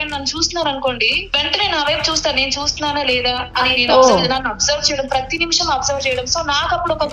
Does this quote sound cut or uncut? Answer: cut